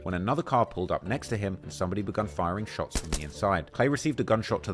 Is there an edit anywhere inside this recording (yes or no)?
no